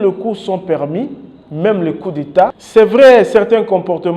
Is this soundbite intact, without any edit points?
no; 1 cut; at 2.6 s

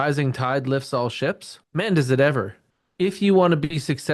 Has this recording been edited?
yes; 2 cuts; at 1.5 s, 2.6 s

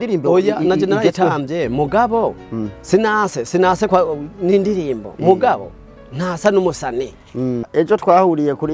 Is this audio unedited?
no; 1 cut; at 7.7 s

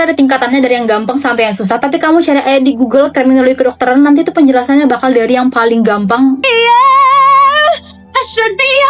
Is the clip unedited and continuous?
no; 1 cut; at 6.4 s

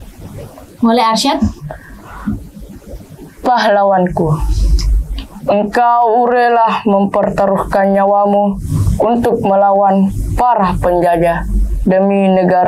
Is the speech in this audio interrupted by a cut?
yes; 1 cut; at 2.5 s

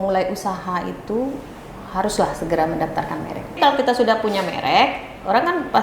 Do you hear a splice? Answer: yes; 1 cut; at 3.4 s

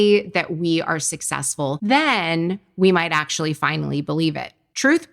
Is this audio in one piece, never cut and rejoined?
no; 1 cut; at 1.8 s

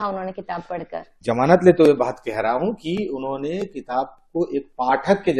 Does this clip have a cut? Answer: yes; 1 cut; at 1.2 s

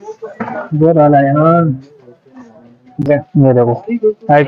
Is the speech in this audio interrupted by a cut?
yes; 1 cut; at 3.0 s

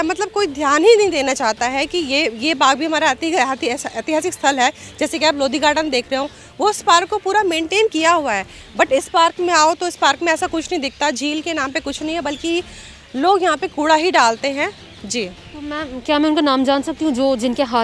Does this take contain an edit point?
no; 0 cuts

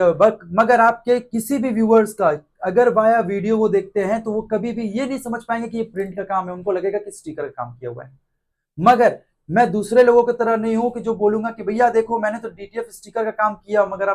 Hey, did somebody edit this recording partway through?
no; 0 cuts

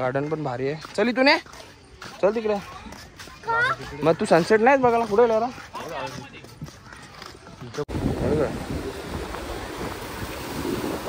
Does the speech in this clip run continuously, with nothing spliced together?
no; 1 cut; at 7.9 s

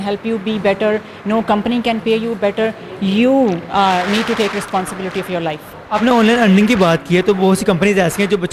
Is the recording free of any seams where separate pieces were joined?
yes; 0 cuts

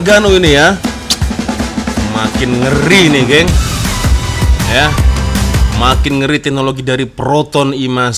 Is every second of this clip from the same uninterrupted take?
yes; 0 cuts

